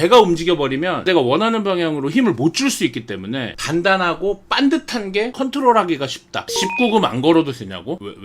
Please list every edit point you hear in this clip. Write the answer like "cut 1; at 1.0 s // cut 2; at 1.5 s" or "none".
cut 1; at 1.1 s // cut 2; at 3.6 s // cut 3; at 5.3 s // cut 4; at 6.5 s